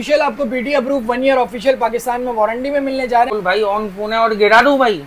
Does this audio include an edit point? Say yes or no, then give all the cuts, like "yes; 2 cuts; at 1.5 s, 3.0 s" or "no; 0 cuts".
yes; 1 cut; at 3.3 s